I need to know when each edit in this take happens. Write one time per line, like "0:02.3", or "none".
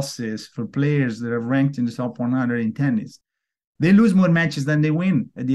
none